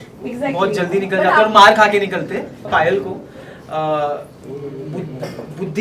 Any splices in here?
yes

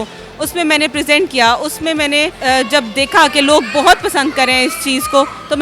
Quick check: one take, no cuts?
no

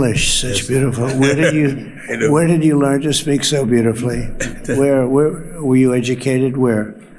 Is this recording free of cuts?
yes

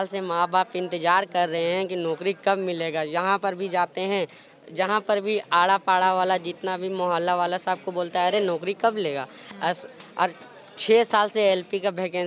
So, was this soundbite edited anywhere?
no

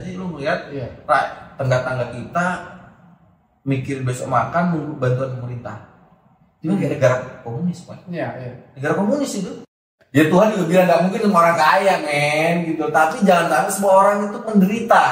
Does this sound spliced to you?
yes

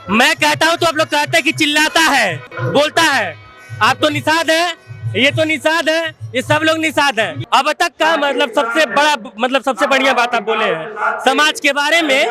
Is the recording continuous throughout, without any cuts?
no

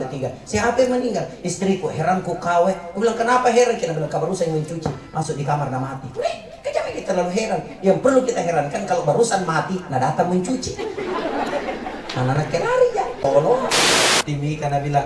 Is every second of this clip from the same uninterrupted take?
no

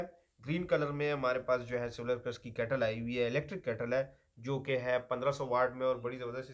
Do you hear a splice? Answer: no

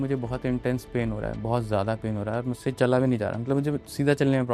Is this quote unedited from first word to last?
yes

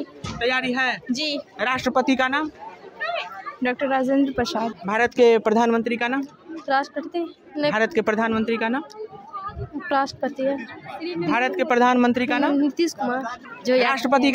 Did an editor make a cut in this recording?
yes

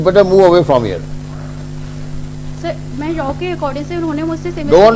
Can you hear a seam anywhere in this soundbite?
no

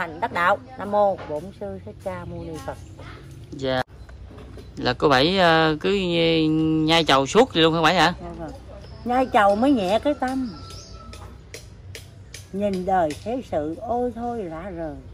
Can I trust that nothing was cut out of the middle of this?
no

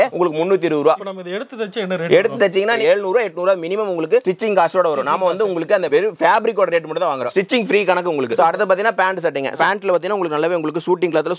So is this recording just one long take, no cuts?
yes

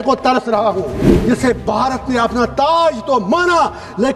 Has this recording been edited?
yes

